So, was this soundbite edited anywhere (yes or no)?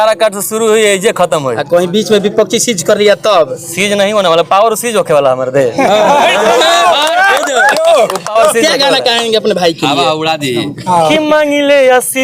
no